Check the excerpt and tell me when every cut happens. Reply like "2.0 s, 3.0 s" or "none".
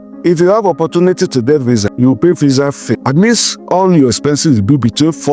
1.9 s, 3.0 s